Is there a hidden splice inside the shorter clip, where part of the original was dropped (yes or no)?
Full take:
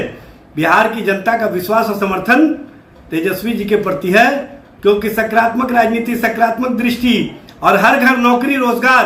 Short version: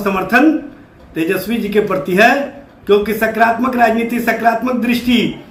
no